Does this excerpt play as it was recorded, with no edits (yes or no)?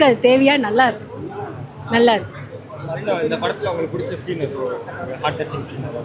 yes